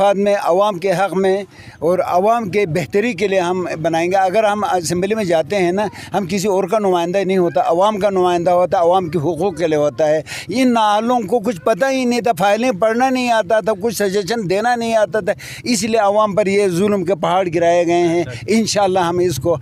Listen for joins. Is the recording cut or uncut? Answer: uncut